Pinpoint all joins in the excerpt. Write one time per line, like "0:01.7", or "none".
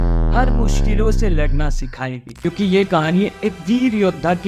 0:02.2